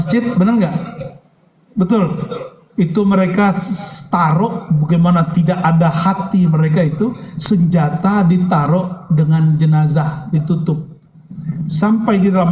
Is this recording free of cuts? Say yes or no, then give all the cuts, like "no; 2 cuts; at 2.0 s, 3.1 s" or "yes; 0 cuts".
yes; 0 cuts